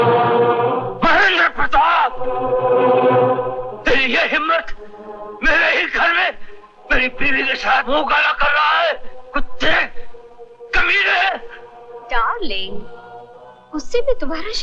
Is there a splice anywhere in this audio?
no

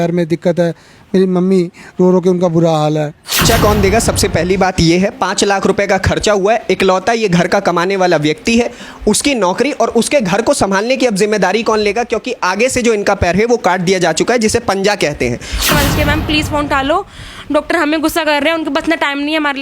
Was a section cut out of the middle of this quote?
yes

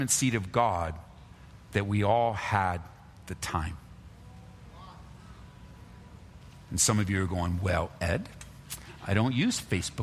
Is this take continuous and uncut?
yes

